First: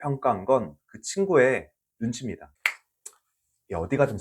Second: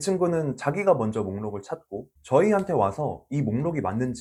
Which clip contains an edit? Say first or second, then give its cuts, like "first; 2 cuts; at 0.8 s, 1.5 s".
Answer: first; 1 cut; at 2.5 s